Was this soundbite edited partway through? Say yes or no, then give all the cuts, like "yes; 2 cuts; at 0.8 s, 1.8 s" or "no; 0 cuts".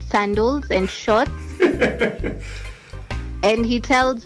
no; 0 cuts